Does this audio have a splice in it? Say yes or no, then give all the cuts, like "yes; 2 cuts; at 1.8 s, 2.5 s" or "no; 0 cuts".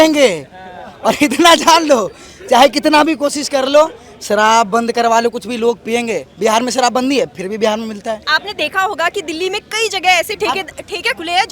yes; 1 cut; at 8.2 s